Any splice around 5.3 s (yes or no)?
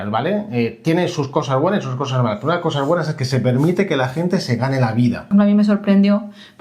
yes